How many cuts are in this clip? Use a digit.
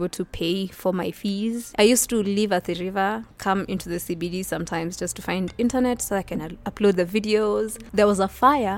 2